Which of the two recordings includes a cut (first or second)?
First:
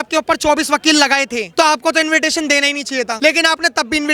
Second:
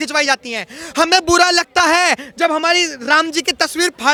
first